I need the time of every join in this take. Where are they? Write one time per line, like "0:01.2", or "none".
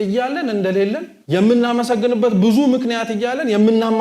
0:01.1